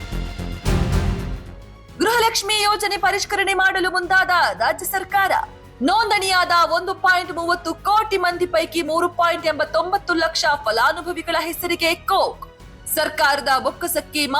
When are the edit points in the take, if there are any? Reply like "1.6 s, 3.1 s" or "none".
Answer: 1.2 s